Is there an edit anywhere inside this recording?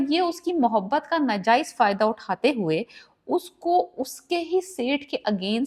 no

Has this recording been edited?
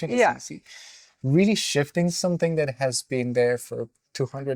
no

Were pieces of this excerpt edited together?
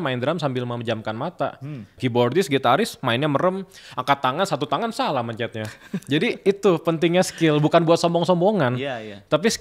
yes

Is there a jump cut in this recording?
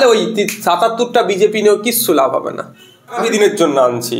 yes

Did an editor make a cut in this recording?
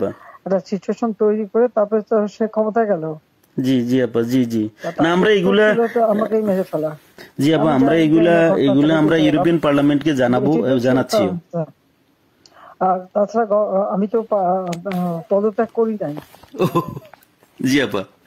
no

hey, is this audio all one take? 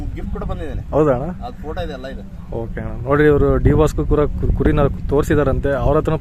yes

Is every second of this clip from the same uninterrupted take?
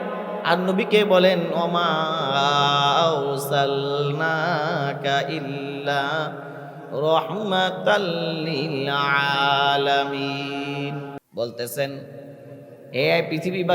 no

